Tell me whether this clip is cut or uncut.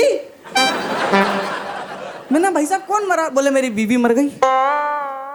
uncut